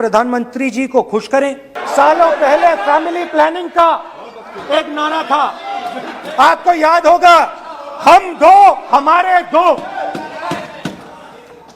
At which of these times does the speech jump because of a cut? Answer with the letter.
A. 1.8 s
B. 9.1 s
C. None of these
A